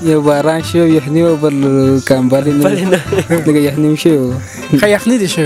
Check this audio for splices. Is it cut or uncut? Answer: uncut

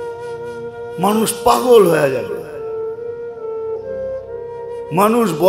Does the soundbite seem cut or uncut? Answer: cut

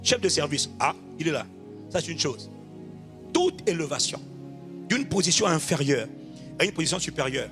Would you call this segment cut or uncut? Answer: uncut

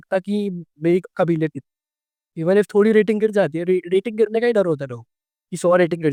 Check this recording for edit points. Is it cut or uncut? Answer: uncut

